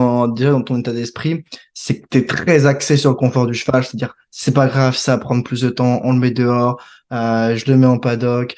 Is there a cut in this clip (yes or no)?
no